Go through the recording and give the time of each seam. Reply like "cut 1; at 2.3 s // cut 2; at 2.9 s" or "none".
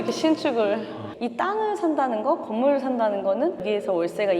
cut 1; at 1.0 s

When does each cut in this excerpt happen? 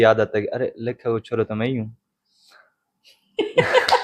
none

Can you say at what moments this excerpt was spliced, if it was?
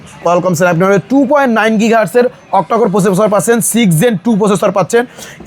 none

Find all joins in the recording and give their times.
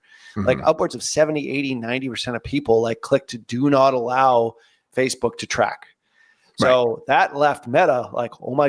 none

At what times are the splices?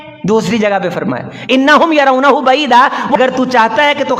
cut 1; at 3.2 s

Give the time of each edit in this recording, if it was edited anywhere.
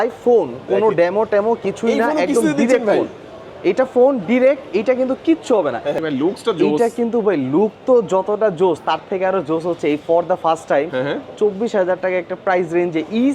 cut 1; at 6.0 s

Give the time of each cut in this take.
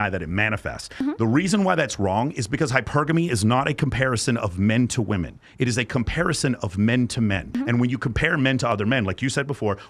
cut 1; at 0.9 s // cut 2; at 7.5 s

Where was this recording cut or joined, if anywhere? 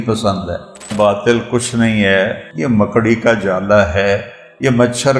cut 1; at 0.9 s // cut 2; at 2.5 s

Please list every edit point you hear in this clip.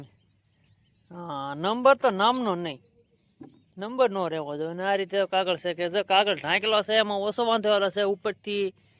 none

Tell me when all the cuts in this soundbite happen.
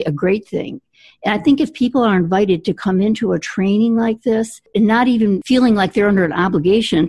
cut 1; at 4.6 s // cut 2; at 5.4 s

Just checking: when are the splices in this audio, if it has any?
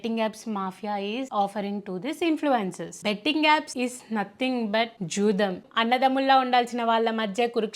cut 1; at 2.9 s // cut 2; at 5.6 s

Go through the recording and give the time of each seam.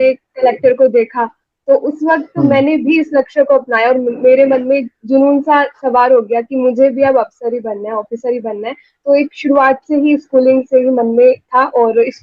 none

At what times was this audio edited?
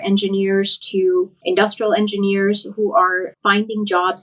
none

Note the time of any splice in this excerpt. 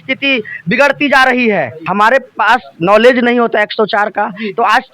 cut 1; at 1.8 s

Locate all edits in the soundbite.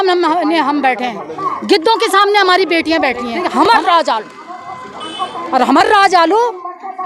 cut 1; at 3.4 s

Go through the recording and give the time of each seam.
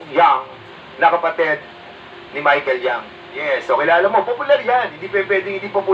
cut 1; at 3.3 s

